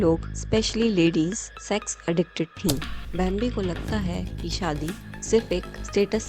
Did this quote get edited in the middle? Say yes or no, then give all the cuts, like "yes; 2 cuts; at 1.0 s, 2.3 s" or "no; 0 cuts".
yes; 1 cut; at 3.0 s